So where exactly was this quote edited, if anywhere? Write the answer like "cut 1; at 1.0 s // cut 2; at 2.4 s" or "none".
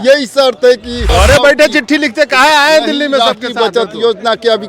cut 1; at 1.0 s

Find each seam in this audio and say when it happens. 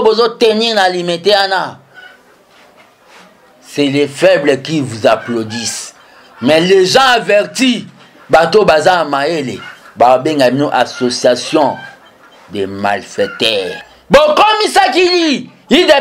cut 1; at 13.9 s

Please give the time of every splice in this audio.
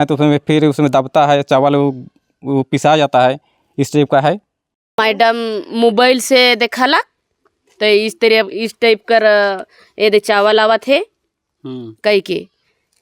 cut 1; at 5.0 s

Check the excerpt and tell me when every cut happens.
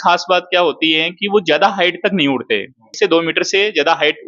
cut 1; at 2.8 s

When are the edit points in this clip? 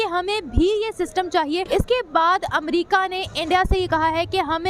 cut 1; at 1.7 s

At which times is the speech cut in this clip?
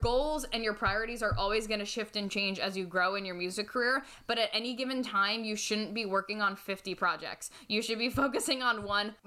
none

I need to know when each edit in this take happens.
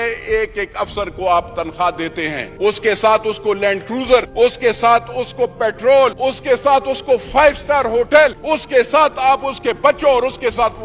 cut 1; at 2.4 s // cut 2; at 4.3 s // cut 3; at 6.2 s // cut 4; at 8.4 s

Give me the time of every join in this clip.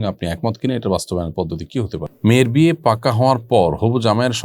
cut 1; at 2.1 s

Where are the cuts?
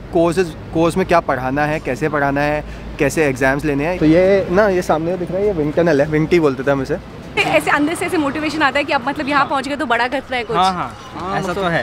cut 1; at 4.0 s // cut 2; at 7.4 s

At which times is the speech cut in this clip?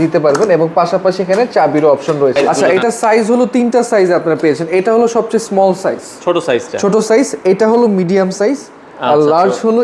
cut 1; at 2.5 s

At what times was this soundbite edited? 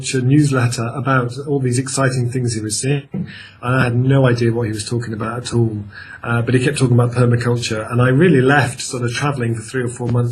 cut 1; at 7.6 s

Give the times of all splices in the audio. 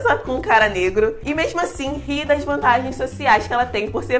none

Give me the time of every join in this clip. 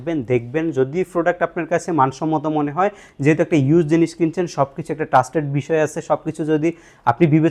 none

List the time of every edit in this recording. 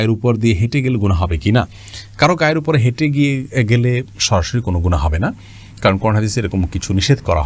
none

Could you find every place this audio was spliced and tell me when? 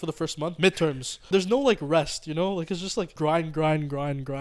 cut 1; at 1.3 s // cut 2; at 3.1 s

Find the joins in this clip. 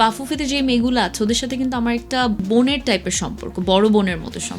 cut 1; at 2.4 s

